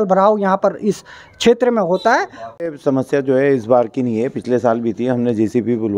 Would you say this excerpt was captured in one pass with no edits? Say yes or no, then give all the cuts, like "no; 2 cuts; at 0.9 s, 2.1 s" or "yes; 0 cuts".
no; 1 cut; at 2.6 s